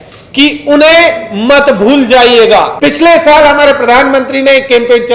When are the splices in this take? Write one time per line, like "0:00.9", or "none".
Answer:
0:02.7